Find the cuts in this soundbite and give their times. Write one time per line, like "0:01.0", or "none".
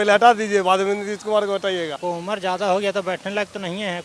0:01.9